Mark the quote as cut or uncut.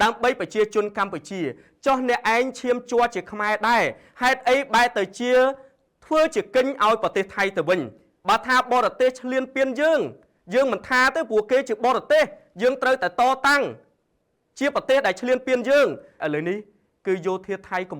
cut